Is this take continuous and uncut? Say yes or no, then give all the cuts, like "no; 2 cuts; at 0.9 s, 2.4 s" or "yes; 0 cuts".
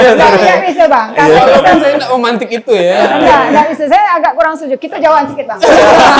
yes; 0 cuts